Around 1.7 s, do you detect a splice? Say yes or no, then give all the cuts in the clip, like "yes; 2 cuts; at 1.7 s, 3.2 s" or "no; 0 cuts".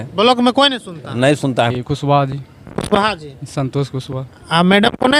yes; 1 cut; at 1.7 s